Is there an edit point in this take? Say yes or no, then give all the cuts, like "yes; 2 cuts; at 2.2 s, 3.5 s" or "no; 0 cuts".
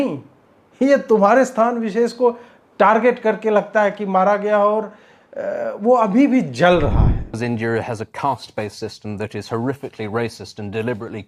yes; 1 cut; at 7.3 s